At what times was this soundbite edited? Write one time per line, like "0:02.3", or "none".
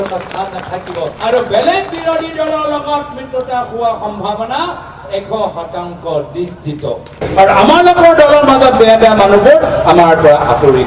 0:01.1
0:07.2